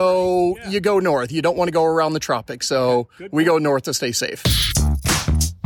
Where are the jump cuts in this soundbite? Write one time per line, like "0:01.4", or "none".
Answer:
0:04.4